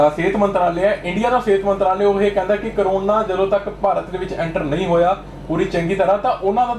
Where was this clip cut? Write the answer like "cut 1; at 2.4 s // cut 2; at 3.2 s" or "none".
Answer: none